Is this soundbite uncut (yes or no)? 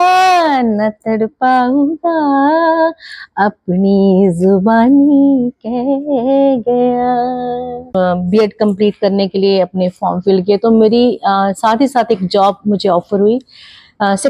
no